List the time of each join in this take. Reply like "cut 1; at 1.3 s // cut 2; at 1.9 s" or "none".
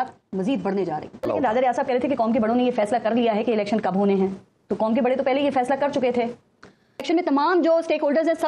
cut 1; at 1.2 s // cut 2; at 7.0 s